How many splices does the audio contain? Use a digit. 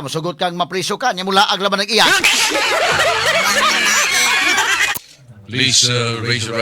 1